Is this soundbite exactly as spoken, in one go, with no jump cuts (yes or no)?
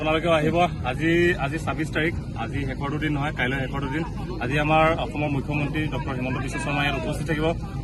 yes